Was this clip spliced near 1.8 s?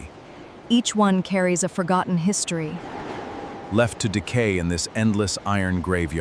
no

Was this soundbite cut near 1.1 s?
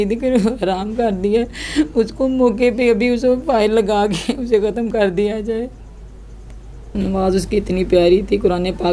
no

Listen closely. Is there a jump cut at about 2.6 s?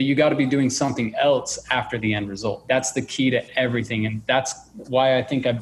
yes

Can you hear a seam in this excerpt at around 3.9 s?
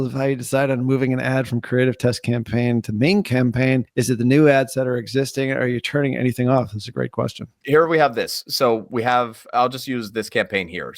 yes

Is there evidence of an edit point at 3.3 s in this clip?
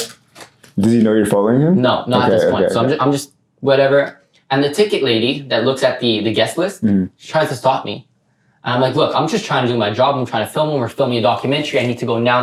no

